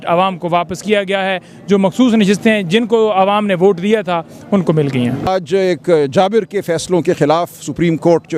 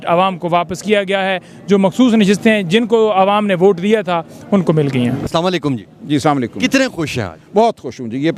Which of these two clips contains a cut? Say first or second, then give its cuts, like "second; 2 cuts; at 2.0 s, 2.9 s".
first; 1 cut; at 5.3 s